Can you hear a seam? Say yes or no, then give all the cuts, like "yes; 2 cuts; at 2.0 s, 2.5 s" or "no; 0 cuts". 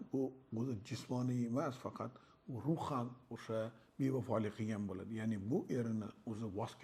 no; 0 cuts